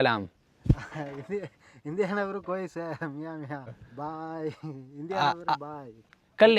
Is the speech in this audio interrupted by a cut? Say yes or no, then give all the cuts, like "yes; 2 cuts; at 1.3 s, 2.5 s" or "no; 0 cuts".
yes; 1 cut; at 3.7 s